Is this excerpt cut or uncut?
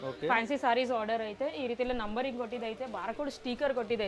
uncut